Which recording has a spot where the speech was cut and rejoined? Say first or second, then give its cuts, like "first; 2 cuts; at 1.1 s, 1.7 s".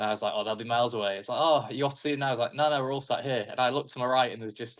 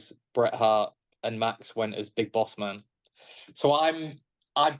second; 1 cut; at 1.0 s